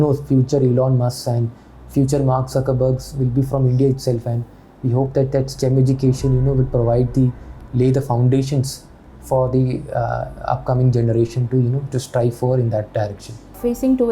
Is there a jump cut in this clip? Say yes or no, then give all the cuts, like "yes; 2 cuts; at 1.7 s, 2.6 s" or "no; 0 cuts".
no; 0 cuts